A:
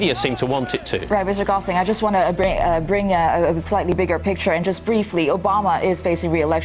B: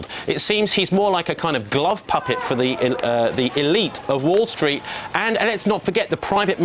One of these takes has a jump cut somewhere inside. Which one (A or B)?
A